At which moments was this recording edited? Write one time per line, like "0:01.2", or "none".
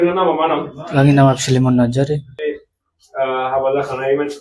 0:02.4